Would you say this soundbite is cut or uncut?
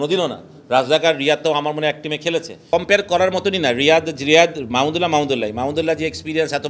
cut